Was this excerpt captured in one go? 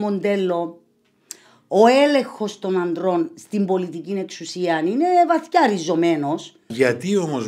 no; 1 cut; at 6.6 s

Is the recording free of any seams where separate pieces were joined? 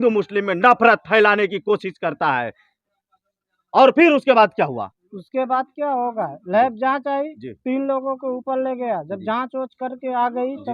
yes; 0 cuts

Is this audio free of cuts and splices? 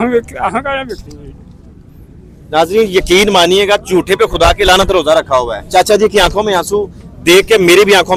yes; 0 cuts

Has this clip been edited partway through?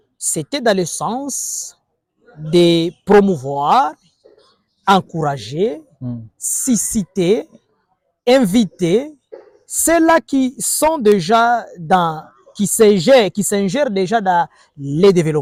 no; 0 cuts

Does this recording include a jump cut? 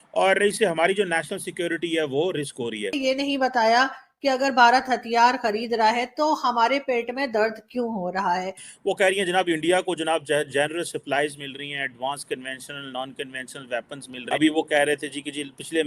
yes; 3 cuts; at 3.0 s, 8.7 s, 14.1 s

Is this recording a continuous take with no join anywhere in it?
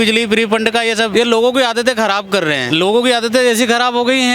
no; 2 cuts; at 1.1 s, 2.6 s

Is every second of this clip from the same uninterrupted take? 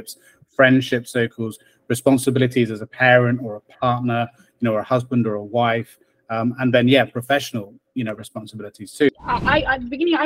no; 1 cut; at 9.2 s

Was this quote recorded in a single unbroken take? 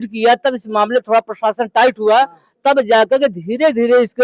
yes; 0 cuts

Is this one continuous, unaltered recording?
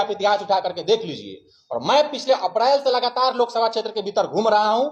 yes; 0 cuts

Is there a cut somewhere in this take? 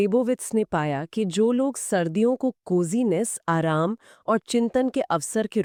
no; 0 cuts

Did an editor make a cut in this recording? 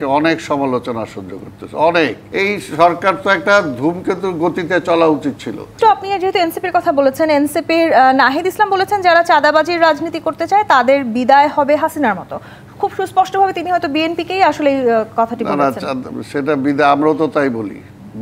yes; 2 cuts; at 2.2 s, 5.7 s

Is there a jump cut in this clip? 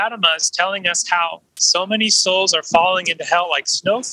yes; 1 cut; at 1.5 s

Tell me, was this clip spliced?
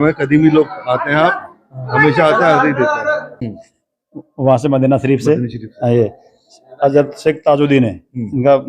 yes; 1 cut; at 3.4 s

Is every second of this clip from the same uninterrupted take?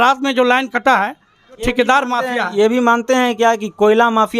no; 1 cut; at 1.6 s

